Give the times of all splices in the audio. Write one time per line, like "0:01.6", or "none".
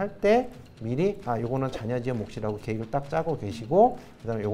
none